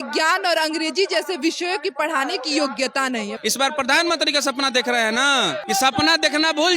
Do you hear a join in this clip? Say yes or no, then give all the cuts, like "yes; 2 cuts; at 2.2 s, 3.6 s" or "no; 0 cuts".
yes; 2 cuts; at 3.3 s, 5.6 s